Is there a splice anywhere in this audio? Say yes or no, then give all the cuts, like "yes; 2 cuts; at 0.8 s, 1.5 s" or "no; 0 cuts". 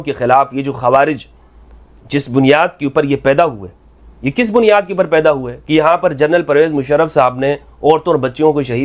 no; 0 cuts